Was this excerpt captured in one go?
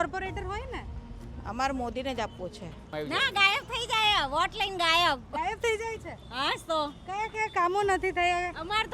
no; 1 cut; at 2.9 s

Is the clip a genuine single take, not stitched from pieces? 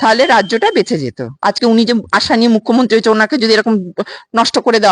no; 1 cut; at 1.3 s

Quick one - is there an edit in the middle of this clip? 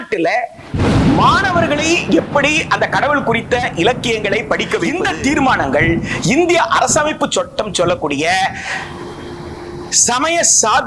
yes; 1 cut; at 5.0 s

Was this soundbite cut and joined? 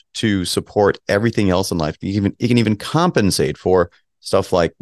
no; 0 cuts

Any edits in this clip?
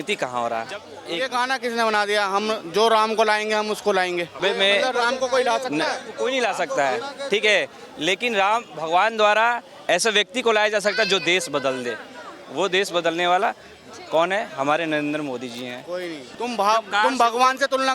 yes; 4 cuts; at 1.0 s, 4.4 s, 6.1 s, 16.2 s

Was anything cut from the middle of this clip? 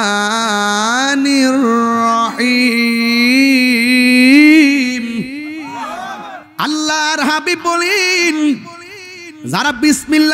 yes; 1 cut; at 6.4 s

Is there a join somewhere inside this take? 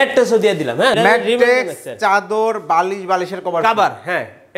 yes; 1 cut; at 0.9 s

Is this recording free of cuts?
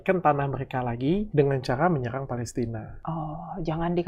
no; 2 cuts; at 1.3 s, 2.9 s

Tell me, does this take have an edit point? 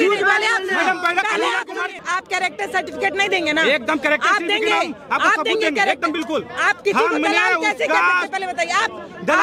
yes; 1 cut; at 2.0 s

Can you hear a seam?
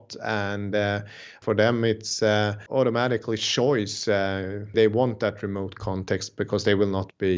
yes; 3 cuts; at 1.4 s, 2.6 s, 4.7 s

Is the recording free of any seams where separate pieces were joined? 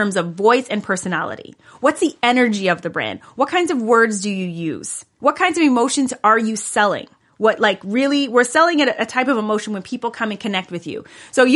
yes; 0 cuts

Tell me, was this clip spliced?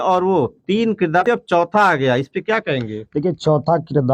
yes; 1 cut; at 1.2 s

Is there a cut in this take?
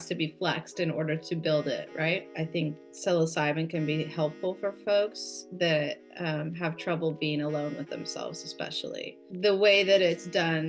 yes; 2 cuts; at 2.2 s, 9.3 s

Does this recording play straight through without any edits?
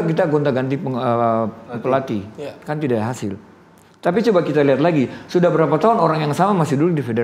yes; 0 cuts

